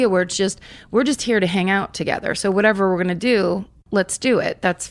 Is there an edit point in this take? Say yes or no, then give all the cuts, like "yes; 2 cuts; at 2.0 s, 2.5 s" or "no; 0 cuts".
yes; 1 cut; at 3.8 s